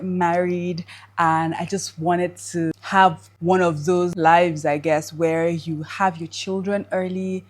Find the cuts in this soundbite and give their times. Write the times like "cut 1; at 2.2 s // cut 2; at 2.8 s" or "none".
cut 1; at 2.7 s // cut 2; at 4.1 s